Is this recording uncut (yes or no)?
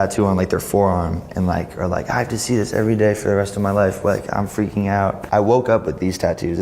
no